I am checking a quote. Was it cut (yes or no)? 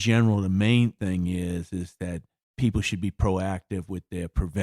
yes